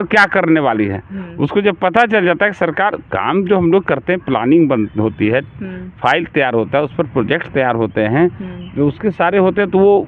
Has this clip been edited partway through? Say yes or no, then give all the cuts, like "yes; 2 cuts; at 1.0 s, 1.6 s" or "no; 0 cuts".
no; 0 cuts